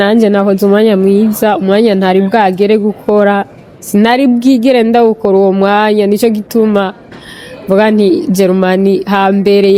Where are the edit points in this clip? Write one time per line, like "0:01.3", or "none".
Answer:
none